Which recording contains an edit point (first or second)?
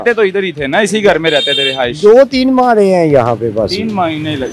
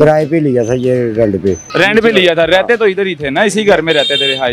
second